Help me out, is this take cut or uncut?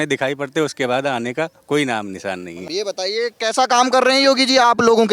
cut